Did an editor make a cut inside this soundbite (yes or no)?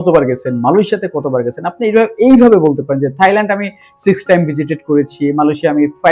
no